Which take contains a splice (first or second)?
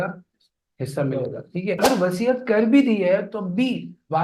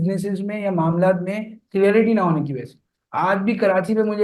first